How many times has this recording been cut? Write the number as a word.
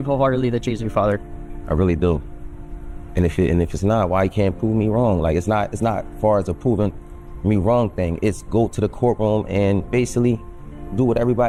zero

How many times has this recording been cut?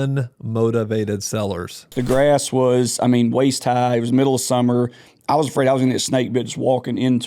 one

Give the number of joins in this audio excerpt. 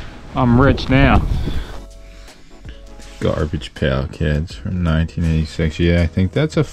one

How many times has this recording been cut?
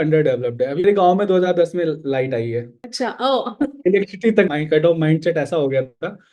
three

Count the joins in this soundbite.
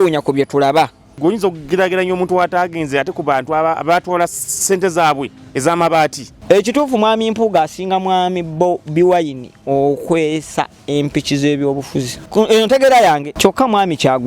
four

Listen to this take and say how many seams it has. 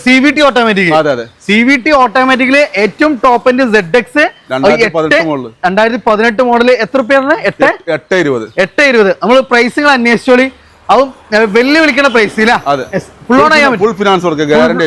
zero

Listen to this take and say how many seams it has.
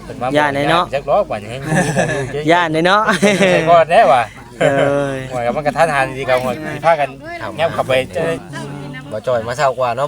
one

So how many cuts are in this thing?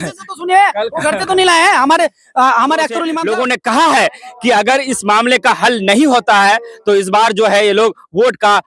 one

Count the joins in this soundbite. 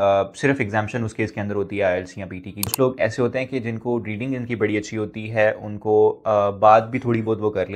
one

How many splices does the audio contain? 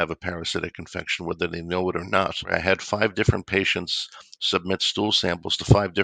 one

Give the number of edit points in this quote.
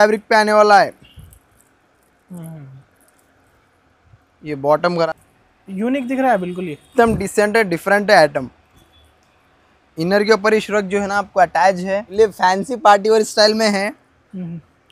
two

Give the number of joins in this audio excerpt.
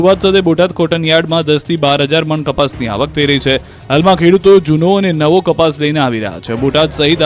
one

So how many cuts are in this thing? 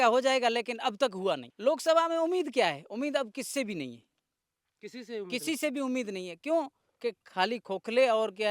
one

